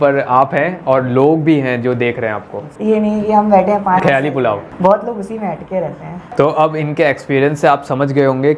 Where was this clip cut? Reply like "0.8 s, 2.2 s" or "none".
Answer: 2.5 s, 6.3 s